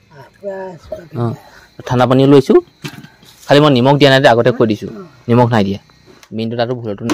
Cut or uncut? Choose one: cut